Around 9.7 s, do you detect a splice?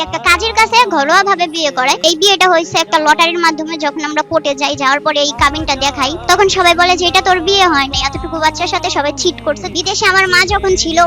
yes; 3 cuts; at 2.0 s, 6.2 s, 9.7 s

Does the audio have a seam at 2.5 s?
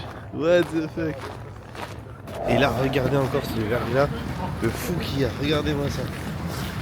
yes; 1 cut; at 2.5 s

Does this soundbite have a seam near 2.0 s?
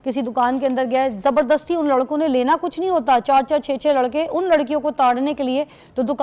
no; 0 cuts

